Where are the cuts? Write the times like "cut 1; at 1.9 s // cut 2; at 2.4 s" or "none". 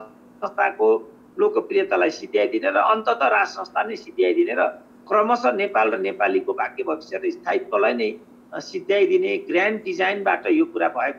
none